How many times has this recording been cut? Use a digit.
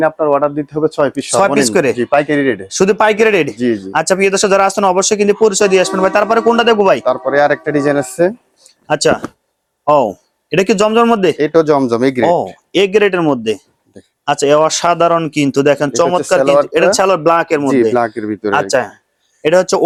0